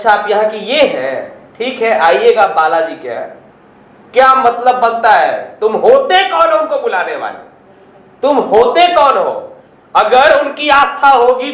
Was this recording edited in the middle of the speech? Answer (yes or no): no